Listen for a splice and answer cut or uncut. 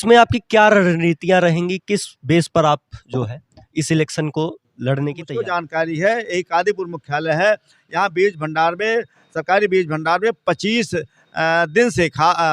cut